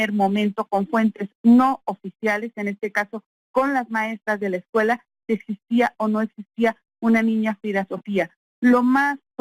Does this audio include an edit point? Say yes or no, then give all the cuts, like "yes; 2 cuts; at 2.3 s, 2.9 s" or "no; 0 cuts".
no; 0 cuts